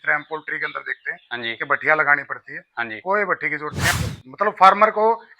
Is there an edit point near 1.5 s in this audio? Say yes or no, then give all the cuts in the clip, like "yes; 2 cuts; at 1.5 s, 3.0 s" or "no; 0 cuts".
no; 1 cut; at 3.9 s